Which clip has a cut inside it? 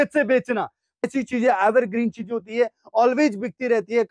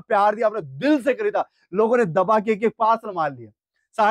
first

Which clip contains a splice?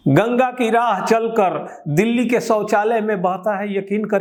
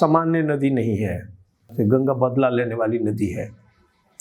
second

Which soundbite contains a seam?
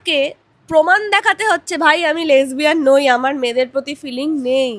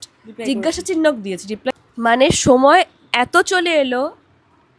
second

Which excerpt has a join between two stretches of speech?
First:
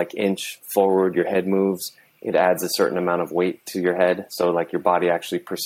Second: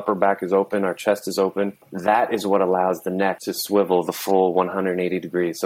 second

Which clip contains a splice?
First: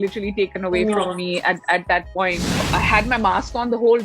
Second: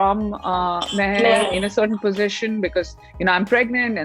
first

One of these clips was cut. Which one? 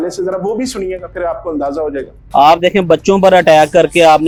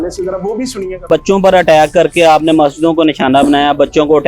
second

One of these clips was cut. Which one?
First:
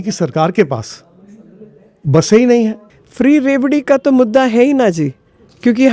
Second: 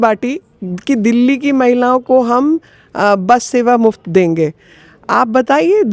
first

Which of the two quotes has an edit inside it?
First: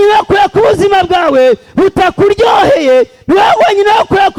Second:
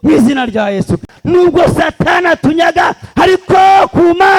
second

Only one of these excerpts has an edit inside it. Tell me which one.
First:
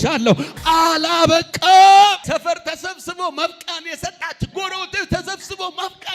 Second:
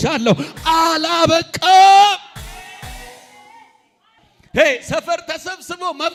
first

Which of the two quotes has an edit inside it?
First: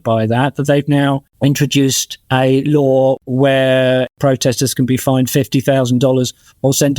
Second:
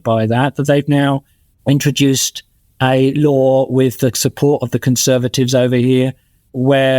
first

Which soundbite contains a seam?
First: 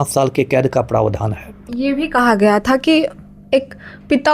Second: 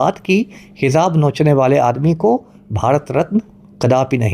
first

